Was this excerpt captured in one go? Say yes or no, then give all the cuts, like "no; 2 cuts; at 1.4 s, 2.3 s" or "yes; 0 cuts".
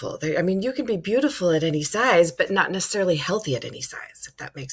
yes; 0 cuts